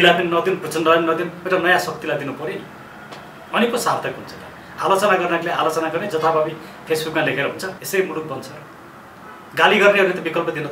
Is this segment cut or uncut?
cut